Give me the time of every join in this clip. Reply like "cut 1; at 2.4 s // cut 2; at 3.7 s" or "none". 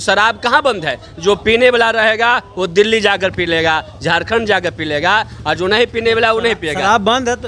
none

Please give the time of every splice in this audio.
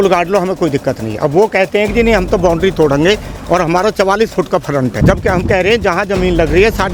cut 1; at 5.0 s

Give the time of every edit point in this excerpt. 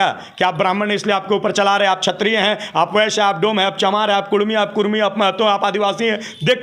none

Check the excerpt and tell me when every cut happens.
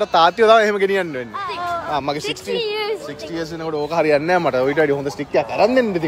cut 1; at 1.8 s

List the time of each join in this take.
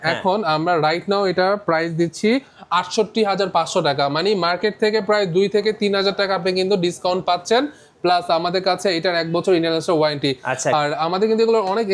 none

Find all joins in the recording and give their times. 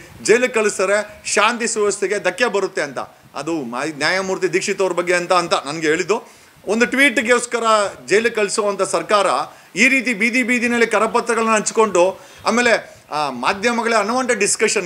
none

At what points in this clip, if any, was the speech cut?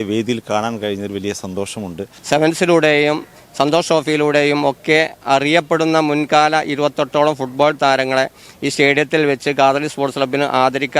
cut 1; at 2.1 s

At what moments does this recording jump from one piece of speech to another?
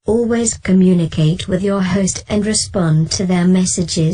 none

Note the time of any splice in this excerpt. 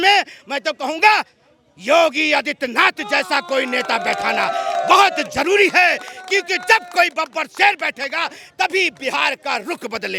none

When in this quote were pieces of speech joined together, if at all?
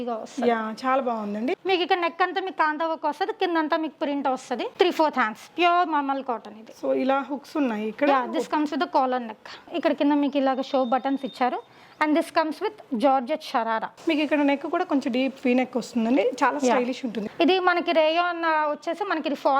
cut 1; at 1.6 s // cut 2; at 9.7 s // cut 3; at 17.2 s

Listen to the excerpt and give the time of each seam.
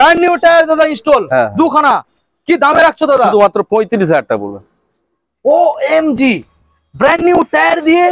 none

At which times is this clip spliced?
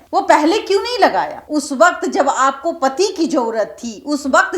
cut 1; at 1.4 s

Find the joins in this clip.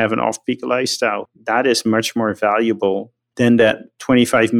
cut 1; at 1.2 s // cut 2; at 3.2 s

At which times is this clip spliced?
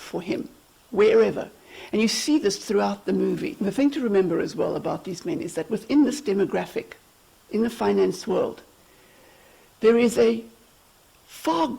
cut 1; at 3.5 s

